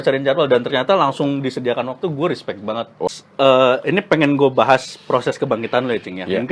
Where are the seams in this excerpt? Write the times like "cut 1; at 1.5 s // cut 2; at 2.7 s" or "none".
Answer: cut 1; at 3.0 s